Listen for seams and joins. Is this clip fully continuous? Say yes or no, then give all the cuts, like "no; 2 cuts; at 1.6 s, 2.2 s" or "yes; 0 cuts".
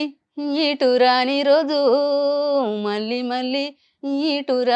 yes; 0 cuts